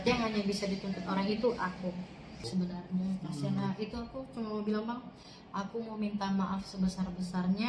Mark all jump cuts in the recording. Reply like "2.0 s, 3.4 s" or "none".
2.4 s

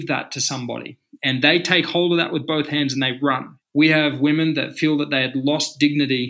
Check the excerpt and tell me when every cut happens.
none

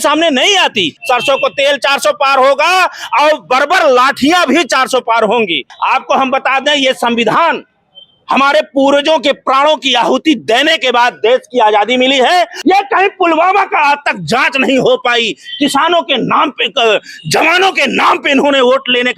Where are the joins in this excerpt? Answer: 1.0 s, 5.7 s, 12.5 s

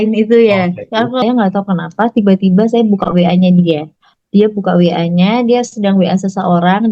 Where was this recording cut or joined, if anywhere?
1.2 s

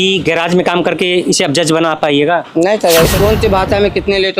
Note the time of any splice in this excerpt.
3.1 s

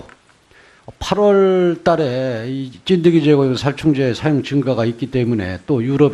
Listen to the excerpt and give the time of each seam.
5.2 s

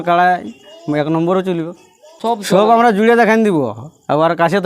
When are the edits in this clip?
2.1 s

